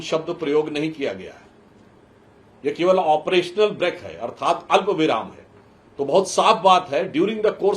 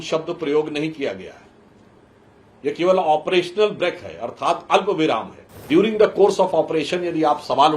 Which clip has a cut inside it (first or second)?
second